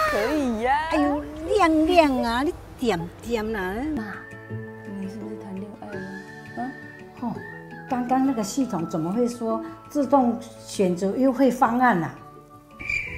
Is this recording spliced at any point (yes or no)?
yes